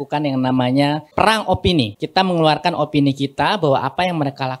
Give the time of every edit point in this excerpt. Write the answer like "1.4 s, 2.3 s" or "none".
1.1 s, 2.0 s